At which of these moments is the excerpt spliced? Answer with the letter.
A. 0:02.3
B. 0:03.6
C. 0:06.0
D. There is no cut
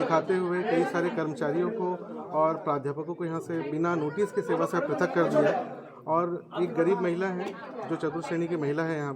D